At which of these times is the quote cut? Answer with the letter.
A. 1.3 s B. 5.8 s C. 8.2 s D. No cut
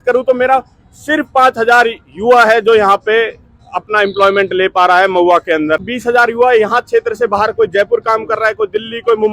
B